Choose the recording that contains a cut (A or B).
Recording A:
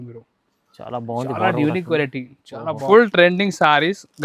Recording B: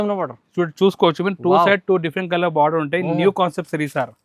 A